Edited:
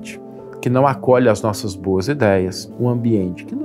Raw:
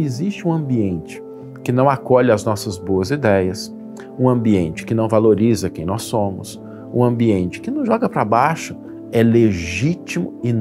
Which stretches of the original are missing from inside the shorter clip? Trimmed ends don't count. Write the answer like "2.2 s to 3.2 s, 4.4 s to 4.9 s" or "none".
3.7 s to 6.8 s